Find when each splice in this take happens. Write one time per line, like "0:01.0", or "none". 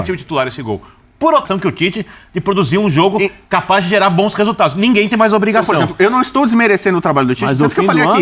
0:01.5